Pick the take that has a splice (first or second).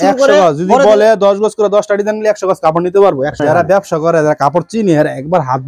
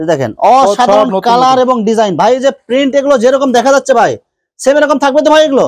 first